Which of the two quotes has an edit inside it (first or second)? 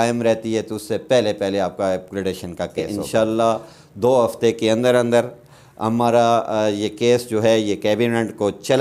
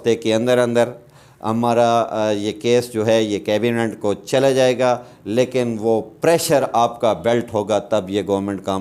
first